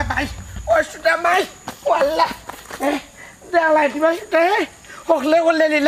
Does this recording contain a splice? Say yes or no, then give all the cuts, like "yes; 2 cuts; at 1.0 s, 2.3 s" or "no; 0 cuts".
no; 0 cuts